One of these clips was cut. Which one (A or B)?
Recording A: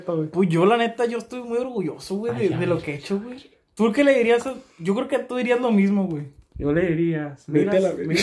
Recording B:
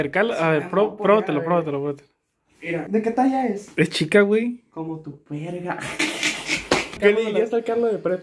B